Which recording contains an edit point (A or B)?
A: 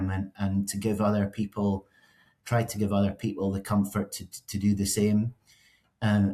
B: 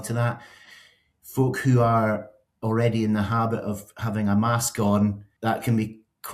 B